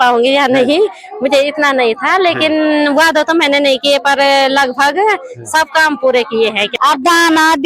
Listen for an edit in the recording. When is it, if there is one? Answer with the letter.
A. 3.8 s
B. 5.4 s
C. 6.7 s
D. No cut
C